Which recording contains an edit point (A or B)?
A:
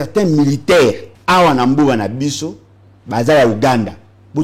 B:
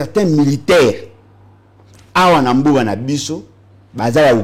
A